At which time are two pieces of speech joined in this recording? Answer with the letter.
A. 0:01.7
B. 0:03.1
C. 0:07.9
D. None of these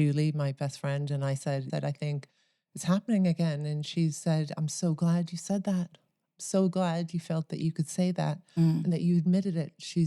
A